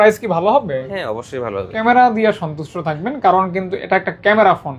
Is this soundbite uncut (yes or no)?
no